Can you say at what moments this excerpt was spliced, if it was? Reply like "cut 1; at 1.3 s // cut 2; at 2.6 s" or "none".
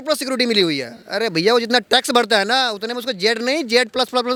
none

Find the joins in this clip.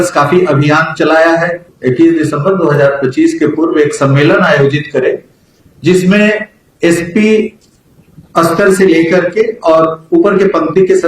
cut 1; at 1.7 s

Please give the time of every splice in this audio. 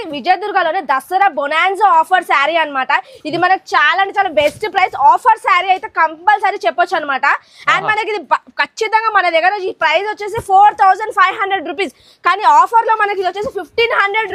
none

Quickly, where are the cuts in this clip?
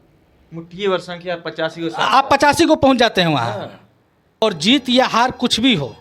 cut 1; at 4.4 s

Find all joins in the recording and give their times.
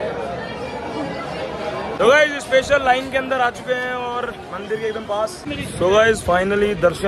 cut 1; at 2.0 s // cut 2; at 5.4 s

